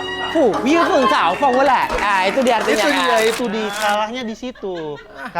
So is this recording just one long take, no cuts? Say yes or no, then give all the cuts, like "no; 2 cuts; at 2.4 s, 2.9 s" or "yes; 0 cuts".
no; 1 cut; at 3.4 s